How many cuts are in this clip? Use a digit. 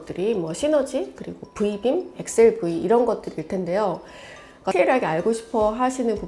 1